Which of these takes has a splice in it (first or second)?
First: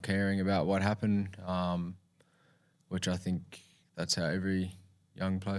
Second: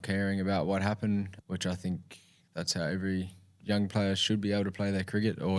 second